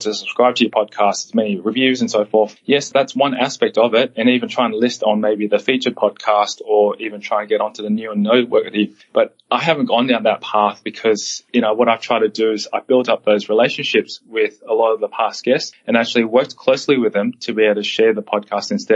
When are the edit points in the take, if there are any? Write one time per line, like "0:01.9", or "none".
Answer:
none

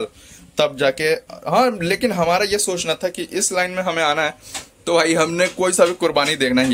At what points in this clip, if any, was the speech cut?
none

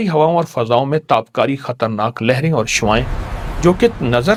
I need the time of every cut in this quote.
none

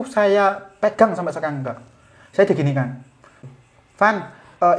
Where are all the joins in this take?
0:03.4

